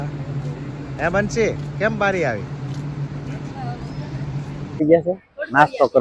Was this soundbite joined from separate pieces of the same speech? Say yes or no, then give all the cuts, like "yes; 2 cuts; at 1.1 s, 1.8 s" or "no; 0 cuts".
yes; 1 cut; at 4.8 s